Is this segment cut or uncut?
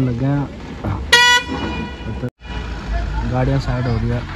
cut